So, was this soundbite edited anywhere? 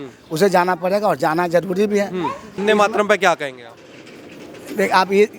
yes; 1 cut; at 2.5 s

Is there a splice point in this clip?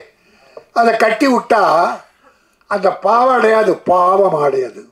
no; 0 cuts

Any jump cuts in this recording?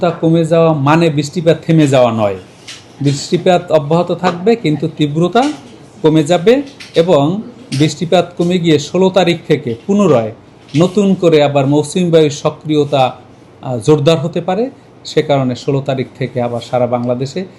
no; 0 cuts

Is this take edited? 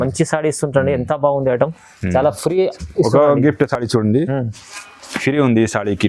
no; 0 cuts

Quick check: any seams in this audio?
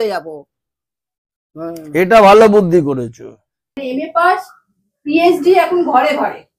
yes; 1 cut; at 3.8 s

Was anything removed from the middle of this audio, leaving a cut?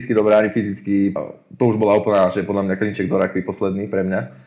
yes; 1 cut; at 1.2 s

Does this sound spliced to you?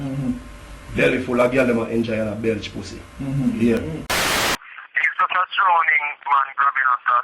yes; 1 cut; at 4.4 s

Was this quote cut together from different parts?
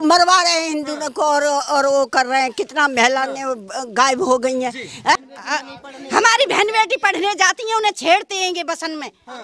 yes; 1 cut; at 5.2 s

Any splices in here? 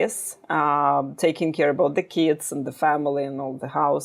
no; 0 cuts

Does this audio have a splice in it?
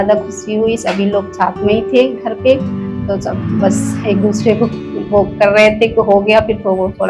no; 0 cuts

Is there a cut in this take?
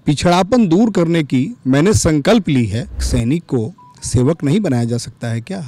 yes; 1 cut; at 3.1 s

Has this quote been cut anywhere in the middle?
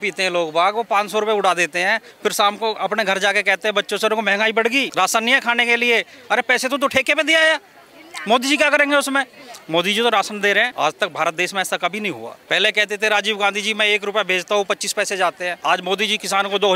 yes; 4 cuts; at 4.9 s, 10.7 s, 12.3 s, 15.5 s

